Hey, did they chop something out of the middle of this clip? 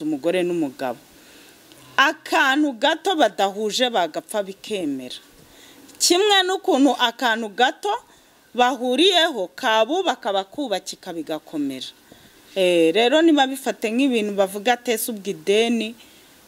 no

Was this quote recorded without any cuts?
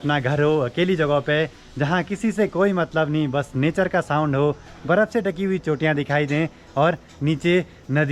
yes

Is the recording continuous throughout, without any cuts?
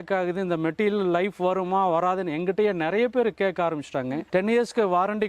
no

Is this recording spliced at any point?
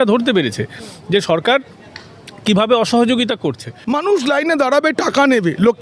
yes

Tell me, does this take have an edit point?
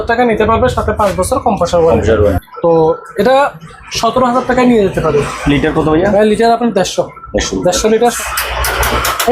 yes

